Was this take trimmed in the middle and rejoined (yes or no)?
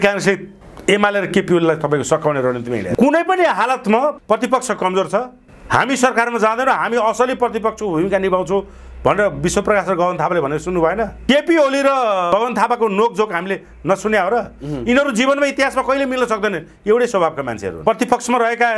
yes